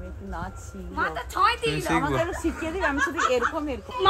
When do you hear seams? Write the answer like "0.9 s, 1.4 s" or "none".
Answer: none